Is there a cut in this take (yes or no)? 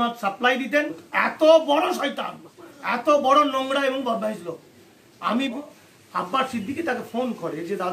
yes